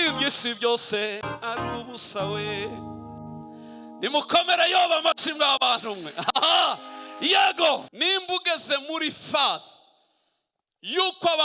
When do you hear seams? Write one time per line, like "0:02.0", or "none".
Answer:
0:07.9